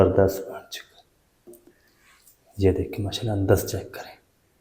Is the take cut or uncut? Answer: cut